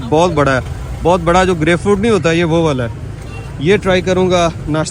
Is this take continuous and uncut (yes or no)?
yes